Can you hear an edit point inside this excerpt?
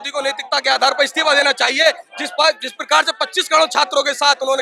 no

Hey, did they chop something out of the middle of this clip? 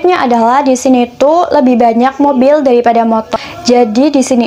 yes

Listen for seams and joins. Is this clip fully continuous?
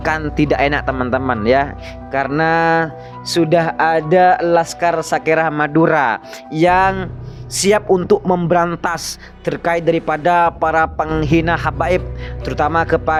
yes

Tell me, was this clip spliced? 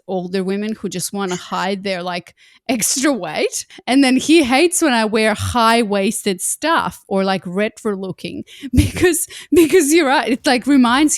yes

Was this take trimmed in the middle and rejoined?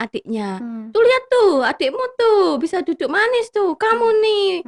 no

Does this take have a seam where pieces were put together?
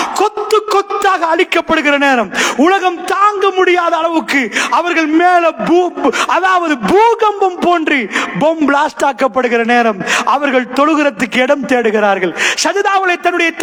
no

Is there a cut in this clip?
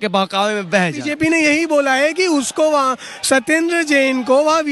yes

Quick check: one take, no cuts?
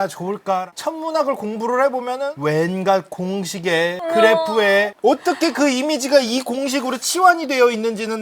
no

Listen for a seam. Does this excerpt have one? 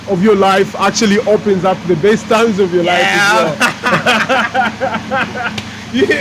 no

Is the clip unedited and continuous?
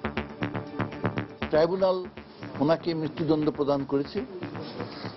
no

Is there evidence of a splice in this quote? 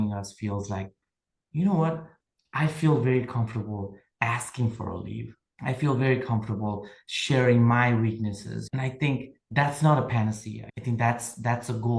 no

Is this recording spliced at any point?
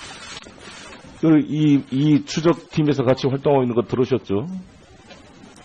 no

